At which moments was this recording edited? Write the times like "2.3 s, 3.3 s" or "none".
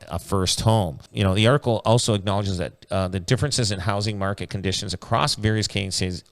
1.1 s